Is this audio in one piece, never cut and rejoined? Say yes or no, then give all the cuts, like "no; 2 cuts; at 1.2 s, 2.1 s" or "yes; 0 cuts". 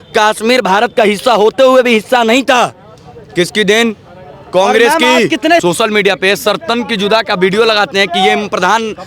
no; 1 cut; at 5.6 s